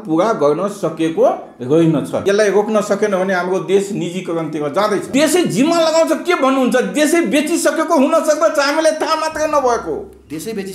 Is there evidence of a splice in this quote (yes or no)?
yes